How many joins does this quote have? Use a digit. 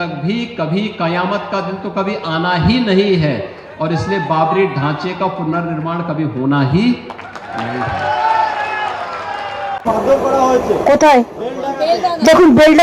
1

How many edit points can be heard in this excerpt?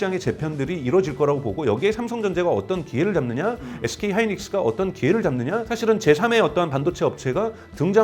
1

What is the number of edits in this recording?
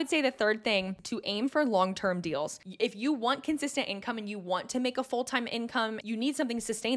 3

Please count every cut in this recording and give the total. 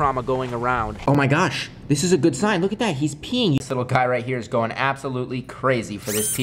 2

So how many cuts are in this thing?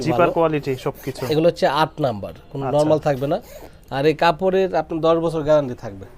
0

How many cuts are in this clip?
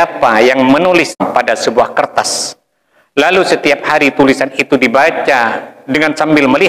1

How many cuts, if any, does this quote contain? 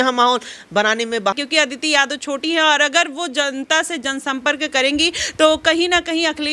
1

